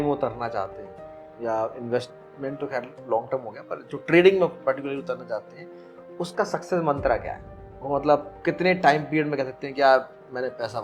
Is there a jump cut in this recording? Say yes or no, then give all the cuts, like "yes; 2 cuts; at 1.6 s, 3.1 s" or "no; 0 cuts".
no; 0 cuts